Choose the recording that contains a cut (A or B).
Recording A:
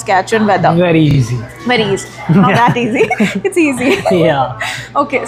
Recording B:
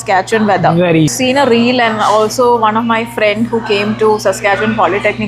B